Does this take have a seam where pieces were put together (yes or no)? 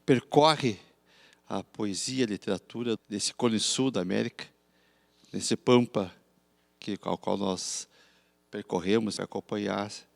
yes